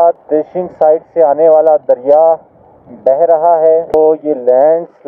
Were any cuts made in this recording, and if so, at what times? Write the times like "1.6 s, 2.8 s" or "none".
3.9 s